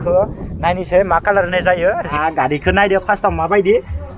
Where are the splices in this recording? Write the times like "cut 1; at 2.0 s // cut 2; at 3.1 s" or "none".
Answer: cut 1; at 2.1 s